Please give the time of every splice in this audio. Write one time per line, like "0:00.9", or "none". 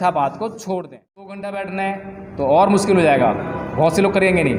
0:01.3